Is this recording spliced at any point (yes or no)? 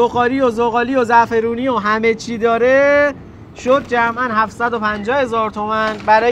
no